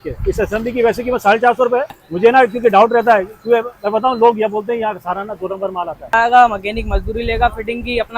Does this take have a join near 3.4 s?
no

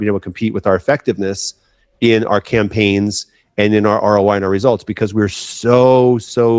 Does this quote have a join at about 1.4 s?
no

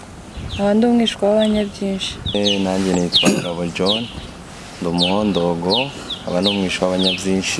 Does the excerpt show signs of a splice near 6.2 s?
no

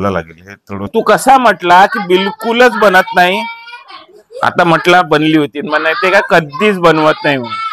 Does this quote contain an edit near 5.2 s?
no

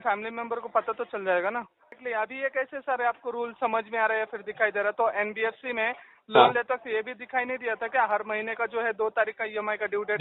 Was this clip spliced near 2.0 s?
yes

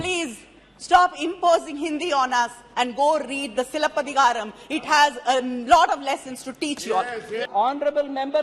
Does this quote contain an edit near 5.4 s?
no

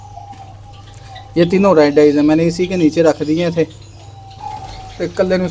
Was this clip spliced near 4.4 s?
yes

